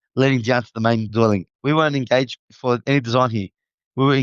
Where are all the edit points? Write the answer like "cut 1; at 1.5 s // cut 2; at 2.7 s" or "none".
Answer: cut 1; at 1.5 s // cut 2; at 2.4 s